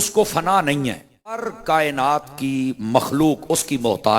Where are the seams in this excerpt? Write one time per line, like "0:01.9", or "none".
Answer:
0:01.5